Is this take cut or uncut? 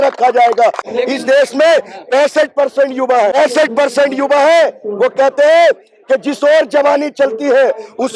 cut